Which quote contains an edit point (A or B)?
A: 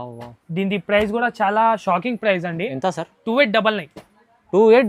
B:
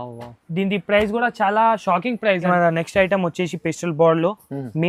B